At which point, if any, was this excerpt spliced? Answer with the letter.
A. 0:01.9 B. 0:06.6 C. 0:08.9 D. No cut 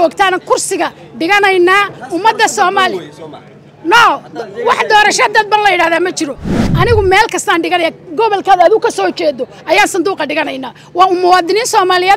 B